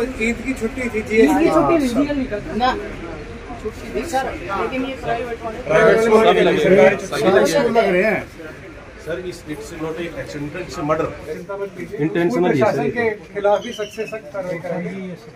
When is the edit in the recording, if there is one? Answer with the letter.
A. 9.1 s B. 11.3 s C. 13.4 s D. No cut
B